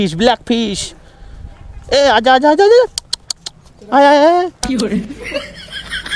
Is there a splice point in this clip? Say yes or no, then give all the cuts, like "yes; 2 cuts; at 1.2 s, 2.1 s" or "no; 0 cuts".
yes; 1 cut; at 4.6 s